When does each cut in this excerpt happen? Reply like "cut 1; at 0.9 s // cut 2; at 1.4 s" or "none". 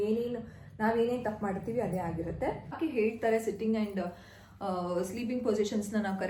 cut 1; at 2.8 s